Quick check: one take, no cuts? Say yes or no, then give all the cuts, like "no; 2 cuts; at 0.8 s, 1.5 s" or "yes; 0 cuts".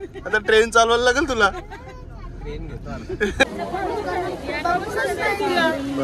no; 1 cut; at 3.4 s